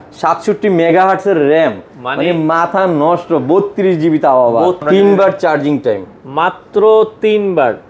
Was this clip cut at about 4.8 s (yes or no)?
yes